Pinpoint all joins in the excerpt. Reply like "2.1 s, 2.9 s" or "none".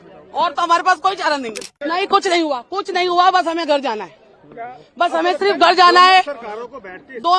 1.6 s